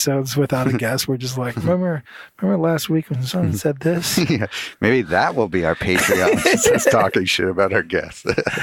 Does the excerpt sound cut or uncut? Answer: uncut